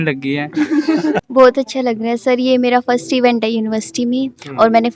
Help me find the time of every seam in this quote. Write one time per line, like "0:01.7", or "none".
0:01.2